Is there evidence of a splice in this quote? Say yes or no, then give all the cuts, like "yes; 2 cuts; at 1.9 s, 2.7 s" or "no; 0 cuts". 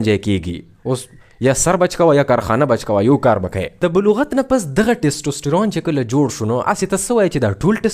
yes; 1 cut; at 3.6 s